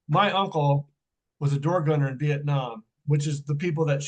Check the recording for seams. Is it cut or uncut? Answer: cut